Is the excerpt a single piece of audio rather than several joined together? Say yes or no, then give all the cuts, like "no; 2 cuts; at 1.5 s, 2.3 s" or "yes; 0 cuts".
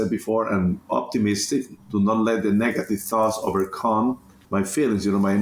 no; 1 cut; at 4.3 s